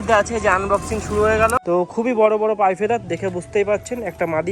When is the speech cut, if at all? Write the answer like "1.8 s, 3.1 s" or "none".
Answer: 1.5 s

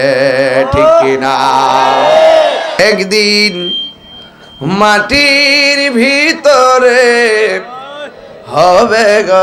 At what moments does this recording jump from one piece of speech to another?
2.8 s

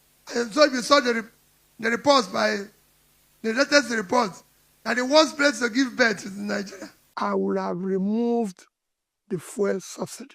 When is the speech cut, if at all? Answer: 7.0 s

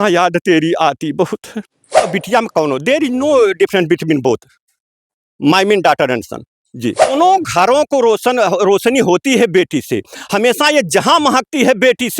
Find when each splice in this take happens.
2.1 s, 7.1 s

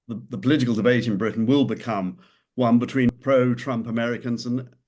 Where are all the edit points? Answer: 3.2 s

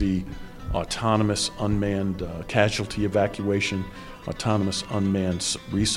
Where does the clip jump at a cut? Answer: none

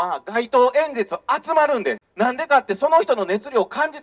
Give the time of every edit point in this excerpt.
2.0 s

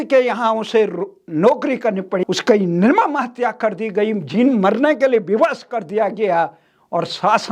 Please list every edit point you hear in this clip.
2.2 s

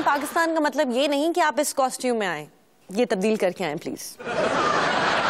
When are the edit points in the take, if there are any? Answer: 4.1 s

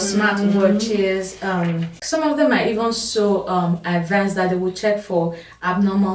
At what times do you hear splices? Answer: 1.9 s

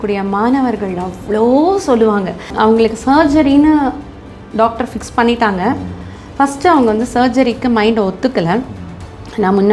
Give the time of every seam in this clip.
2.5 s

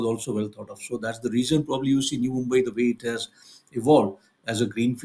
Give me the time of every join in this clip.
none

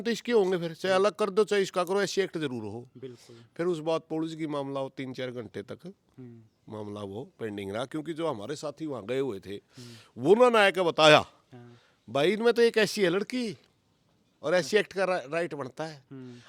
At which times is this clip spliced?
none

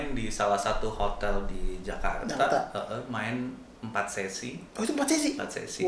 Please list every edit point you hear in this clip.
none

